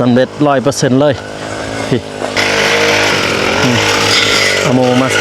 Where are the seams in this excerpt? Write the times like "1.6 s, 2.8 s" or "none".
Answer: 2.4 s